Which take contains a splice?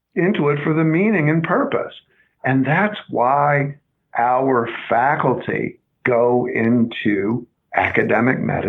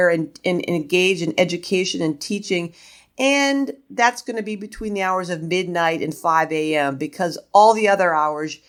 first; 2 cuts; at 5.8 s, 7.5 s

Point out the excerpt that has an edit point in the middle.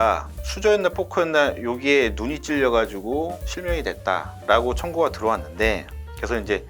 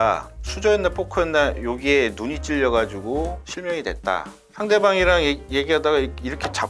second; 1 cut; at 4.3 s

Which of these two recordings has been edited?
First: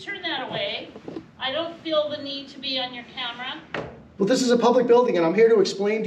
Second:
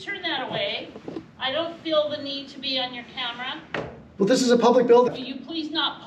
second; 1 cut; at 5.1 s

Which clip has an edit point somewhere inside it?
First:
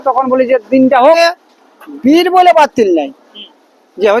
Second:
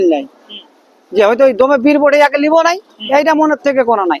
first; 1 cut; at 1.2 s

